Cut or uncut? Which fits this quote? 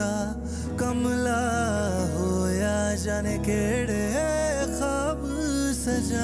uncut